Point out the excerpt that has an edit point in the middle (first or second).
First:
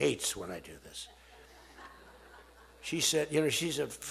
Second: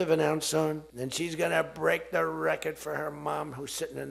second